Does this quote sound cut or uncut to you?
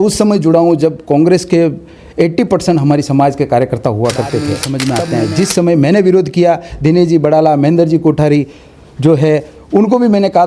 cut